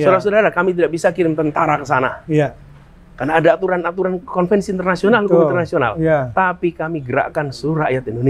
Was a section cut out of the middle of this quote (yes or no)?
no